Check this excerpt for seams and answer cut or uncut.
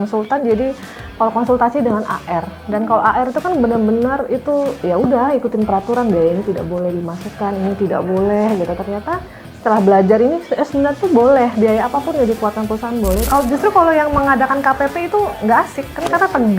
cut